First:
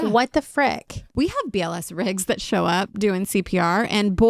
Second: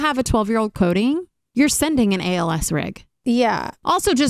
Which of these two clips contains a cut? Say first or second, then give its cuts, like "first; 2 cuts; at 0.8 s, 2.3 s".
second; 1 cut; at 1.4 s